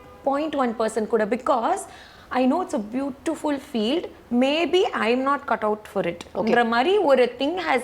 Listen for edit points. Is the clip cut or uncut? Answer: uncut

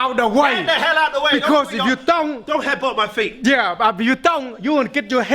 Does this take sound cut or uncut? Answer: uncut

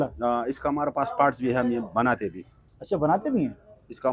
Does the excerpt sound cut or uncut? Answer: uncut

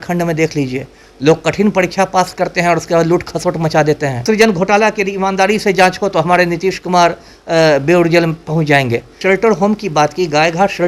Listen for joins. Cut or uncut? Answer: cut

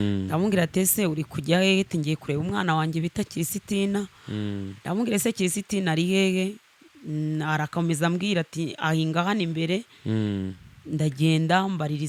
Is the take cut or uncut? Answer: uncut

